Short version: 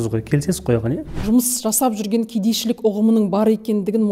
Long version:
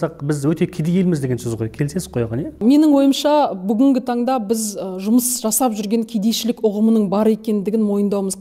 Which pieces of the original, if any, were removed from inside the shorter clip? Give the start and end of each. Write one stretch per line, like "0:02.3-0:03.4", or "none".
0:02.5-0:04.8